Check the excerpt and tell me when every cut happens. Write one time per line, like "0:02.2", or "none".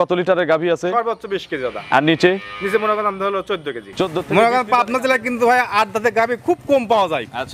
0:04.2